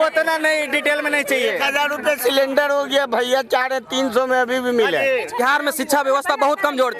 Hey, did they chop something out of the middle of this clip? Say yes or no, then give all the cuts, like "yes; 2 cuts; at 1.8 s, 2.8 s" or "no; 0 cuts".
yes; 1 cut; at 5.3 s